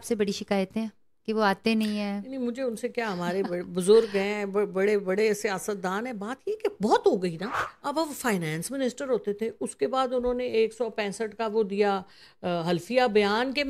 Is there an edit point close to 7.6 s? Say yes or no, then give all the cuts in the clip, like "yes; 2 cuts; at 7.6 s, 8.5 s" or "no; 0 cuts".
yes; 1 cut; at 7.6 s